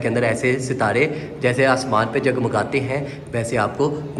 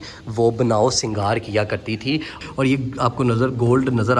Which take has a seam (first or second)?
second